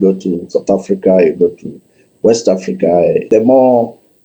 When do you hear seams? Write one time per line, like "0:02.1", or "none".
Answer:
0:03.3

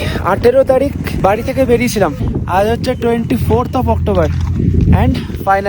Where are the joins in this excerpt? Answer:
0:01.1
0:02.2

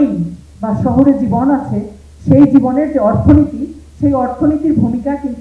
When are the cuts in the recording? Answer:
none

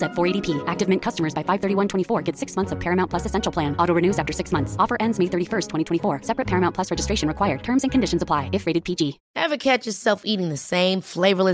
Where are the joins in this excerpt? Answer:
0:09.2

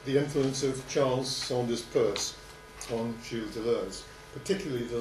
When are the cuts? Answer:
none

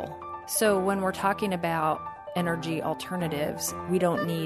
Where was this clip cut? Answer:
0:02.1

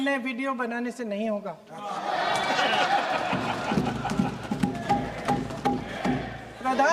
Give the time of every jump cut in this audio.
none

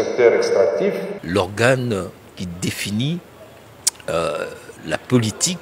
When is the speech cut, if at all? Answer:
0:01.1

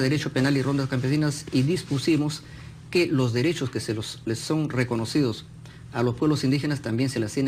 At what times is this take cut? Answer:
none

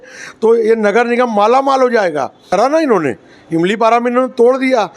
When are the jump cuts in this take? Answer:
0:02.5

